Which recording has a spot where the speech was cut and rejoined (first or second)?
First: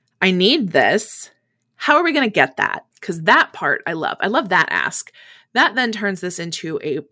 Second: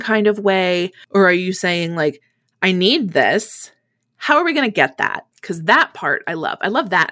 second